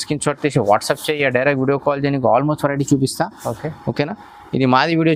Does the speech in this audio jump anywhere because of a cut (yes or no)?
no